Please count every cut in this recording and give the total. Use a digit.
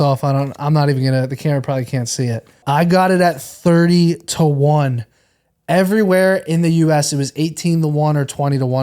1